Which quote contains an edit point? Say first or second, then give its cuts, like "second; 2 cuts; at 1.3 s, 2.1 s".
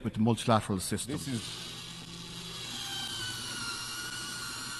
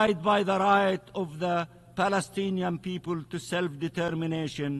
first; 1 cut; at 1.1 s